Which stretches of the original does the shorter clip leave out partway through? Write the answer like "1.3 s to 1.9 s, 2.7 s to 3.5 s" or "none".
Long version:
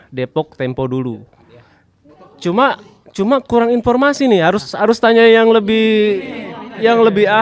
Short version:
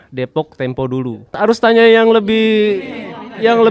1.3 s to 4.7 s